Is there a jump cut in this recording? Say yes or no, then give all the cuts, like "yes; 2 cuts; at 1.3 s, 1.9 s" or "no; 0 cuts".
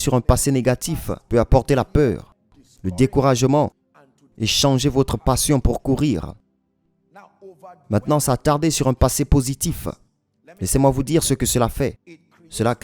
yes; 1 cut; at 1.1 s